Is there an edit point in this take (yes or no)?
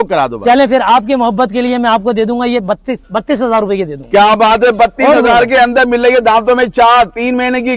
no